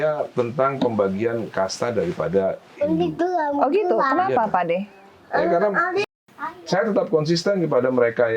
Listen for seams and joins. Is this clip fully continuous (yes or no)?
no